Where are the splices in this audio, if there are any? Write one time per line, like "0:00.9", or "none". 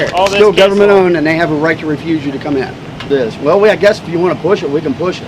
0:03.0